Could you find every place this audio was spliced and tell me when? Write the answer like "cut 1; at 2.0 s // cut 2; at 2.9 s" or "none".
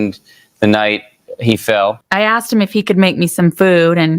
cut 1; at 2.0 s